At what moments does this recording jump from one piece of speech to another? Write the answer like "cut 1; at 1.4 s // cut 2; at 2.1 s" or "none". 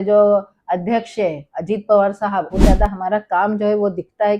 cut 1; at 2.6 s